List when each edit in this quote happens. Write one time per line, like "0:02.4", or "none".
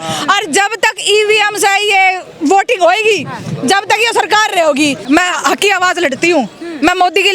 0:05.0